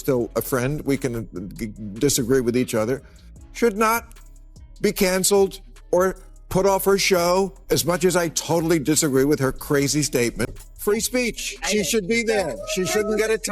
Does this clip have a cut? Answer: yes; 1 cut; at 10.5 s

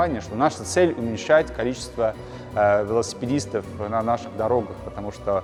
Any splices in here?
no; 0 cuts

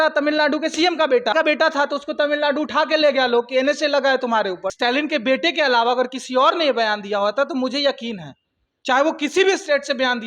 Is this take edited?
yes; 2 cuts; at 1.3 s, 4.7 s

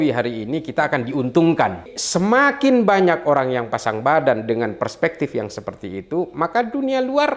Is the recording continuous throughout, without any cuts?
no; 1 cut; at 2.0 s

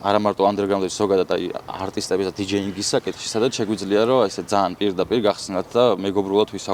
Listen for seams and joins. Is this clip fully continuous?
yes; 0 cuts

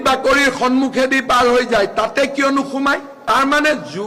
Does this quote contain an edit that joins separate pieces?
yes; 1 cut; at 3.2 s

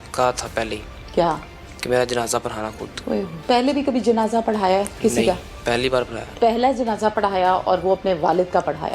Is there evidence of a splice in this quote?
yes; 2 cuts; at 3.3 s, 6.2 s

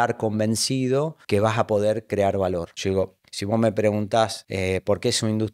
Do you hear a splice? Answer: yes; 3 cuts; at 1.2 s, 2.7 s, 4.4 s

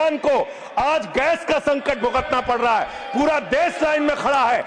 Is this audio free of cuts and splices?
yes; 0 cuts

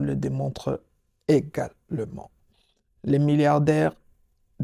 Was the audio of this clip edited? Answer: no; 0 cuts

